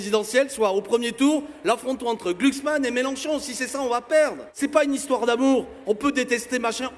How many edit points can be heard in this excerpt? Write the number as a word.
one